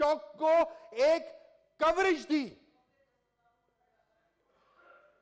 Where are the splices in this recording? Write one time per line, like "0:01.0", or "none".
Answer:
none